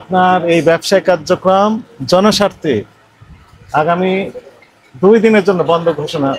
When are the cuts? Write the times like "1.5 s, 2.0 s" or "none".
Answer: none